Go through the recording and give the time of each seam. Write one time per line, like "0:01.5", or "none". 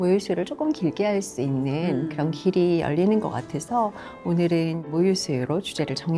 0:04.8